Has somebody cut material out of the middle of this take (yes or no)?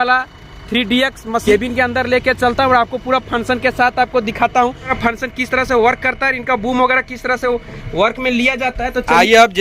yes